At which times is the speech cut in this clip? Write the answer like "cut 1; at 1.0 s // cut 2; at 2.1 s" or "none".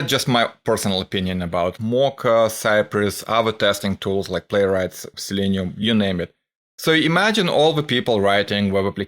cut 1; at 1.8 s // cut 2; at 5.1 s